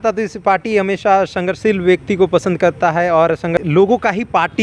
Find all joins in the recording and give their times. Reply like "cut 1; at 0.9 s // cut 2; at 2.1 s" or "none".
cut 1; at 3.6 s